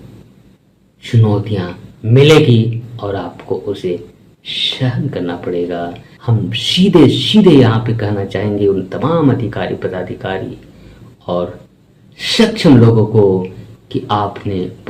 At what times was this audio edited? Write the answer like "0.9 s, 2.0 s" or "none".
6.5 s